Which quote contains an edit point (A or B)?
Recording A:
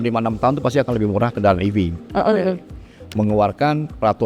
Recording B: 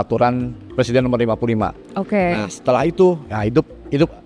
A